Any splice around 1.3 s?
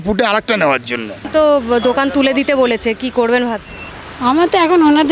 yes; 1 cut; at 1.3 s

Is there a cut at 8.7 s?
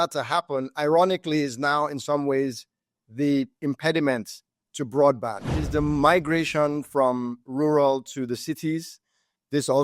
no; 1 cut; at 5.6 s

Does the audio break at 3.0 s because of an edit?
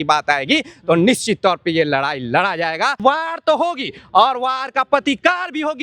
yes; 1 cut; at 3.0 s

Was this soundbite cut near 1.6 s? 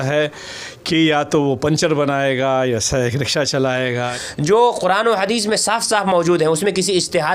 no; 1 cut; at 4.1 s

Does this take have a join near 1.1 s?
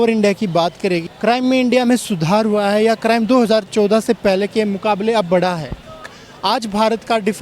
yes; 2 cuts; at 1.1 s, 6.1 s

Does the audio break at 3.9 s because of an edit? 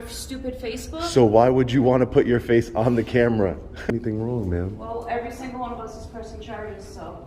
yes; 1 cut; at 3.9 s

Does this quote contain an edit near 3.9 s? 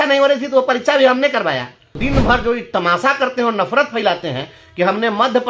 no; 1 cut; at 2.0 s

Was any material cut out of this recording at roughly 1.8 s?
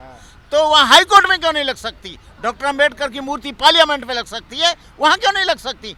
no; 0 cuts

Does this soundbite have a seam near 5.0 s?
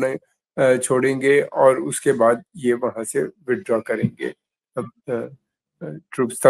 no; 0 cuts

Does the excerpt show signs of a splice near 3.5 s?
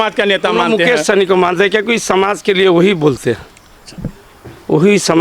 no; 0 cuts

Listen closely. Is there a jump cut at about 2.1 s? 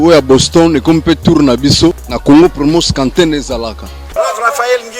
yes; 2 cuts; at 2.1 s, 4.0 s

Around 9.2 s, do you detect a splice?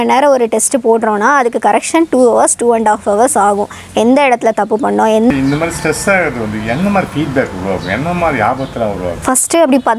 yes; 2 cuts; at 5.3 s, 9.2 s

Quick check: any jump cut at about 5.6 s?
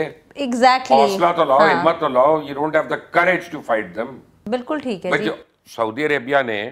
no; 1 cut; at 4.3 s

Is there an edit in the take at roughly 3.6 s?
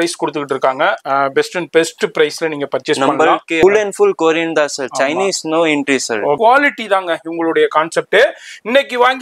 yes; 2 cuts; at 3.6 s, 6.4 s

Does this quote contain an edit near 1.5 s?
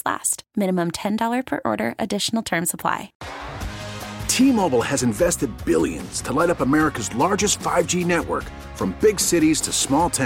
no; 1 cut; at 3.2 s

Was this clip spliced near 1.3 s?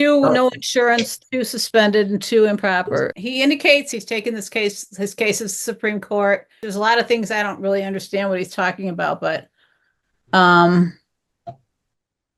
no; 3 cuts; at 3.1 s, 3.9 s, 6.6 s

